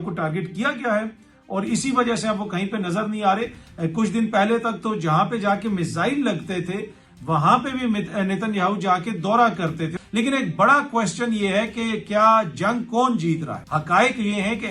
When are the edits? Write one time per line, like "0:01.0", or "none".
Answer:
0:09.9
0:13.6